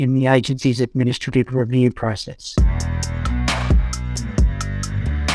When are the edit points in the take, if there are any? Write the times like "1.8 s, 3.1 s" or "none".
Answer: 2.5 s